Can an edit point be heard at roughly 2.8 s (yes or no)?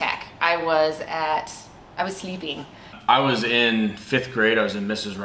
yes